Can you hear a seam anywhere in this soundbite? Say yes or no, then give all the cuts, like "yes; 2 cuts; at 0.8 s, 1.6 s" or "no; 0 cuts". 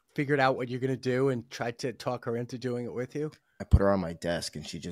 yes; 1 cut; at 3.6 s